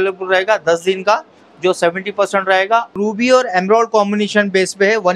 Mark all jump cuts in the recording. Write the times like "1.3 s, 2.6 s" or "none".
3.0 s